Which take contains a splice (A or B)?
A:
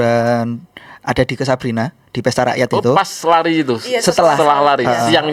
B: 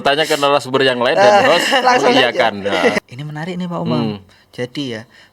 B